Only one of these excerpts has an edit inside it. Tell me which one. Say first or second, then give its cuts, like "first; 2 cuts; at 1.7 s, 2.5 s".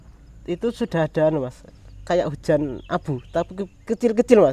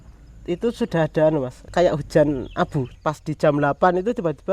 second; 2 cuts; at 1.6 s, 2.8 s